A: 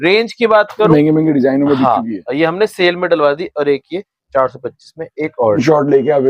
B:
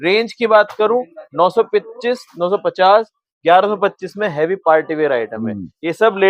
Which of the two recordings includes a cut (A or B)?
A